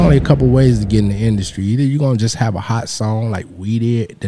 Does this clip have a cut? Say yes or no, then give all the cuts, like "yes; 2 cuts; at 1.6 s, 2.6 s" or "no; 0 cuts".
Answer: no; 0 cuts